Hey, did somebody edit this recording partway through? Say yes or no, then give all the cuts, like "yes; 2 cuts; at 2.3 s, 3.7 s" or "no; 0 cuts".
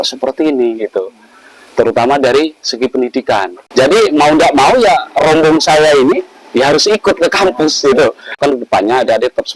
yes; 2 cuts; at 3.6 s, 8.4 s